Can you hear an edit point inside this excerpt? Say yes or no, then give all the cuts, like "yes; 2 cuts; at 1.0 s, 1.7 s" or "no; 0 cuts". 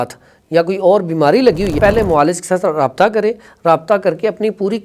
yes; 1 cut; at 1.7 s